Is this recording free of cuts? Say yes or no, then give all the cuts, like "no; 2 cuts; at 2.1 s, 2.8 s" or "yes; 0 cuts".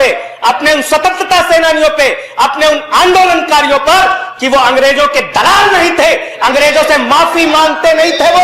yes; 0 cuts